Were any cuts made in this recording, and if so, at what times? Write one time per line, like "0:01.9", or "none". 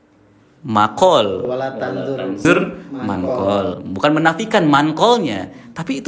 none